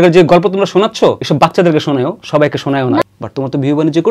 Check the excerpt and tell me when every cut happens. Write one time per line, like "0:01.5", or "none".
0:01.2
0:03.0